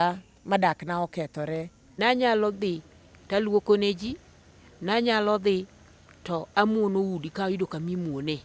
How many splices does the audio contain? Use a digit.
1